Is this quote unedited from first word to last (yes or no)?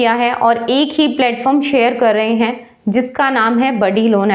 yes